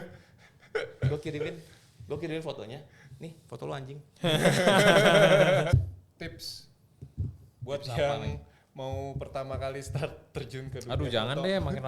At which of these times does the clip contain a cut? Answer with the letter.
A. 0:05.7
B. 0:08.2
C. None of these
A